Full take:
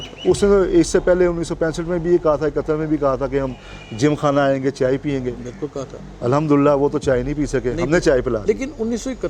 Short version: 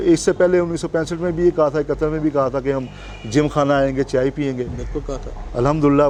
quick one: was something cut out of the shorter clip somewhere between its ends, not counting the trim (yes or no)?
no